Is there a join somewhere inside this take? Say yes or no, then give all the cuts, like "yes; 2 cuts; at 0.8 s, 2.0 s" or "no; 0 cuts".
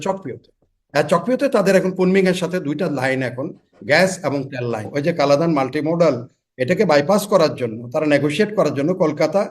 yes; 1 cut; at 4.9 s